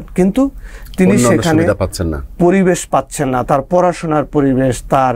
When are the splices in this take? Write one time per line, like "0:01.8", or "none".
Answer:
none